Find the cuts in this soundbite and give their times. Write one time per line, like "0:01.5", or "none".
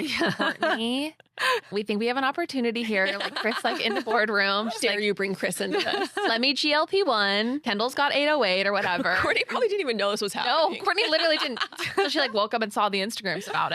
0:01.7
0:07.6